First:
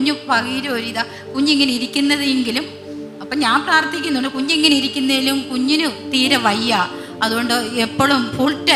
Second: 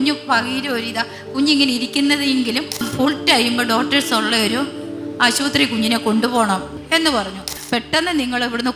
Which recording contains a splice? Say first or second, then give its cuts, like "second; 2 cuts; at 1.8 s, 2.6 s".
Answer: second; 3 cuts; at 2.9 s, 6.7 s, 7.6 s